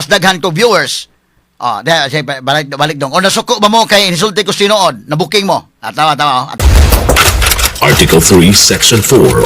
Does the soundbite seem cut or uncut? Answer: cut